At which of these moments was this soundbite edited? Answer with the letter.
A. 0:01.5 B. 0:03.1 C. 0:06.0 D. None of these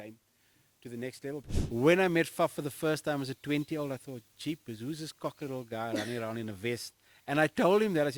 A